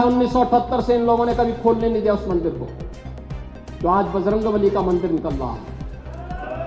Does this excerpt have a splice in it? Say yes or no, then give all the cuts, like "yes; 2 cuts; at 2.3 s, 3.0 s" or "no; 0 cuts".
no; 0 cuts